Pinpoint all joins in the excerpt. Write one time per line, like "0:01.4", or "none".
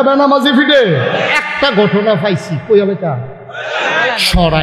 0:01.3